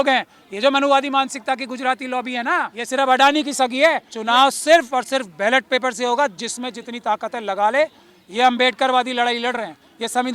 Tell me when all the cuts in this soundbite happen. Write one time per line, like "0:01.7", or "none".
0:02.8
0:04.1